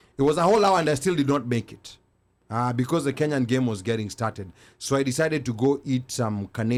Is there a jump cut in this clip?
no; 0 cuts

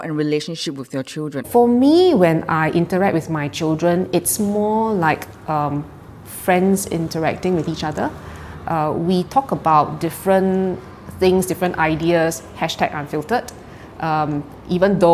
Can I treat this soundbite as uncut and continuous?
no; 1 cut; at 1.4 s

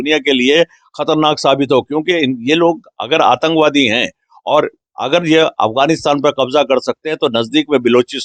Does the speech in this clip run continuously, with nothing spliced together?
yes; 0 cuts

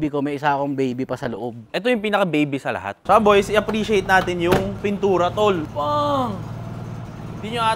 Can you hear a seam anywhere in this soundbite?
yes; 2 cuts; at 2.9 s, 5.7 s

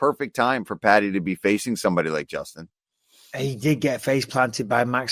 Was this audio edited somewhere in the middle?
yes; 1 cut; at 1.6 s

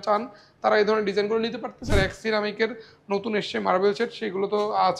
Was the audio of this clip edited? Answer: yes; 1 cut; at 1.9 s

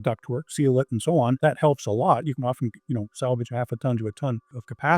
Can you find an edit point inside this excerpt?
yes; 1 cut; at 1.4 s

